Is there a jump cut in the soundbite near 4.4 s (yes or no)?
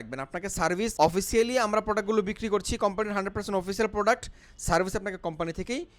no